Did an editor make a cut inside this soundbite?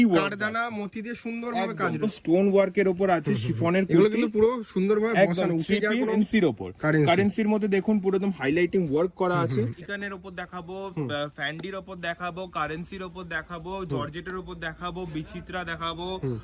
yes; 3 cuts; at 2.1 s, 6.1 s, 9.8 s

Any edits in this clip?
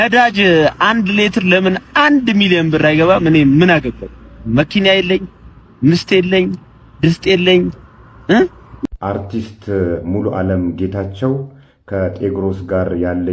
yes; 1 cut; at 8.7 s

